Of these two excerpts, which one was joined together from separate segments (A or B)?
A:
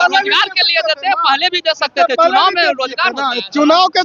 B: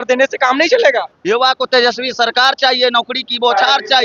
B